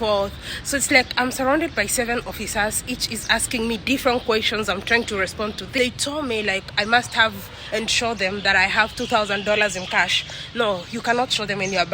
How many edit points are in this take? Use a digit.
1